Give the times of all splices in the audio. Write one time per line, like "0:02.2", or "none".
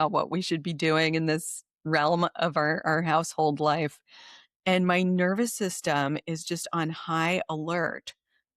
none